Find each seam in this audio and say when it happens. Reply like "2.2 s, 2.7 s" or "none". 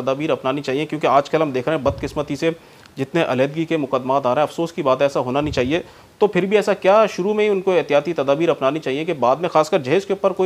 none